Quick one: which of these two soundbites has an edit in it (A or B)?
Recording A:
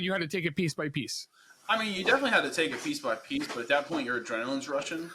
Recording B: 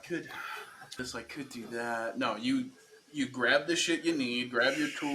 B